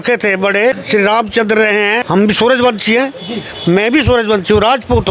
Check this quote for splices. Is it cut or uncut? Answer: cut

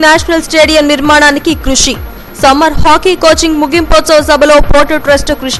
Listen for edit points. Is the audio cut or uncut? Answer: uncut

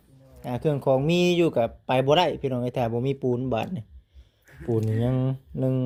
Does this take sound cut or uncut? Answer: uncut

